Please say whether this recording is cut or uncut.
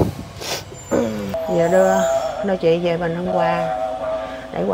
cut